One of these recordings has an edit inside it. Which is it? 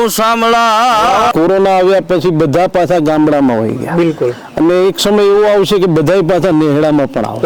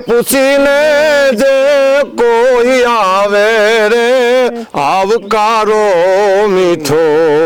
first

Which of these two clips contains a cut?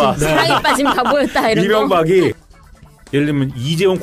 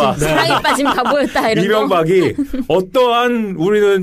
first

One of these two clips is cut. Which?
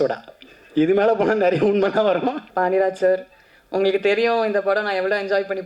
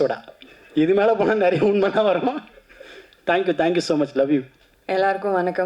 first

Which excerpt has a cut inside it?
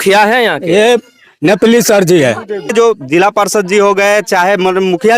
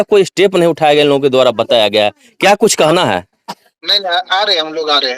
first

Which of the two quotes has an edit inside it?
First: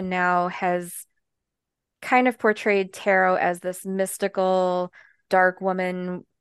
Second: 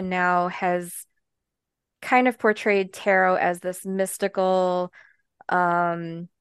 first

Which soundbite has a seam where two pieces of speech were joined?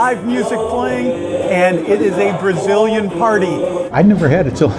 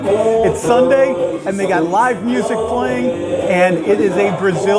first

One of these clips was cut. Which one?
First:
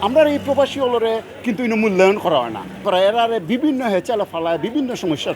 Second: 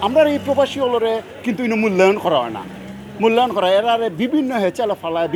first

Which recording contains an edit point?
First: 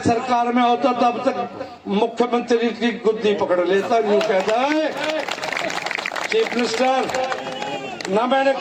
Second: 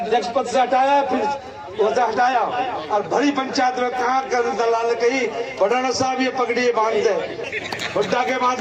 second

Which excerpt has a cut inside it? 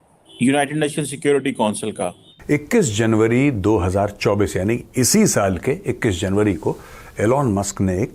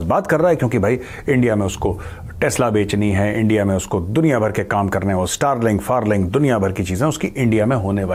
first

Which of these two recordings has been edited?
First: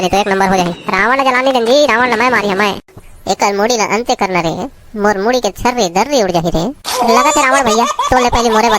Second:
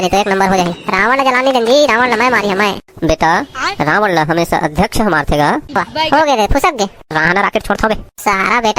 first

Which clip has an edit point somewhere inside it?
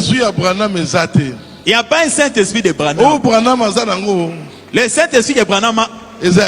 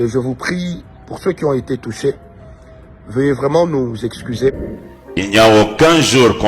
second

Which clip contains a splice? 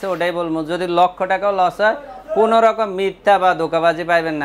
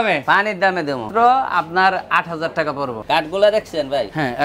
second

